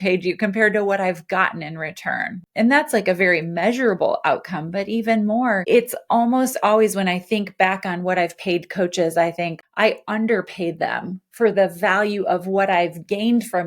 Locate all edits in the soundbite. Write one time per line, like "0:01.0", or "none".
0:02.4